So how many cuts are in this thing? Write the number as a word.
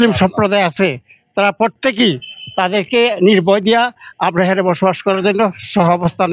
zero